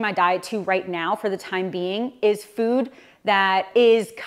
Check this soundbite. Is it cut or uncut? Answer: uncut